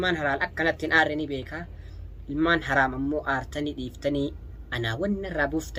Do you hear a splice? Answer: no; 0 cuts

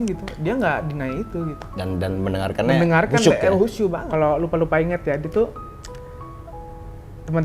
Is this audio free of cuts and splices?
no; 1 cut; at 4.0 s

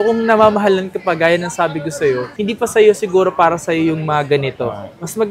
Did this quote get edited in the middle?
no; 0 cuts

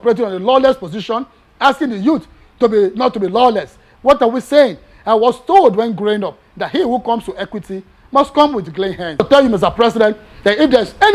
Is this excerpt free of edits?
no; 1 cut; at 9.2 s

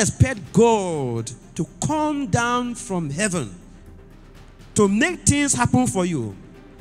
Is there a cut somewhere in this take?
no; 0 cuts

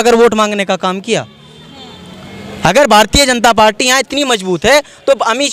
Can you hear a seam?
no; 0 cuts

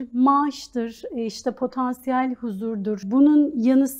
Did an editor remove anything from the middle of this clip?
yes; 1 cut; at 3.0 s

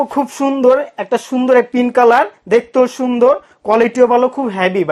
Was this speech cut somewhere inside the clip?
no; 0 cuts

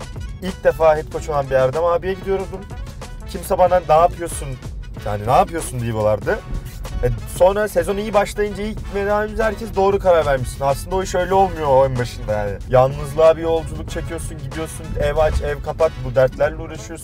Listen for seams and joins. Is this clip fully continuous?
no; 1 cut; at 12.5 s

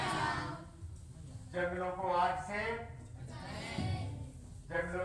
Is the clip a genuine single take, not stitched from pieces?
yes; 0 cuts

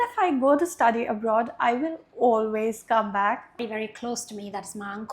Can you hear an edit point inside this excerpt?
yes; 1 cut; at 3.6 s

